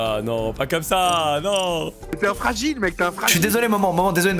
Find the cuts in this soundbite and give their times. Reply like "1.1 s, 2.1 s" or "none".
2.0 s